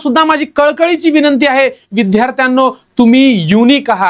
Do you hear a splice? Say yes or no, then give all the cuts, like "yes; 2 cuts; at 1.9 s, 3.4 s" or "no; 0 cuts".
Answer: no; 0 cuts